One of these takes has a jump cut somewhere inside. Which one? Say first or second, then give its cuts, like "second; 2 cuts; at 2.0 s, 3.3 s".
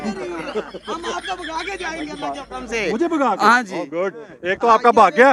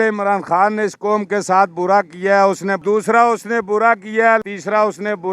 second; 2 cuts; at 2.8 s, 4.4 s